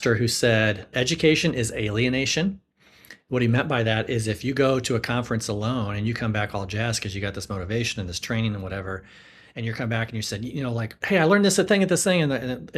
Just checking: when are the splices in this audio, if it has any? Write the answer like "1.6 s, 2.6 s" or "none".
0.9 s